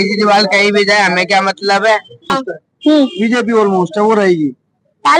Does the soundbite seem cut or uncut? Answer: cut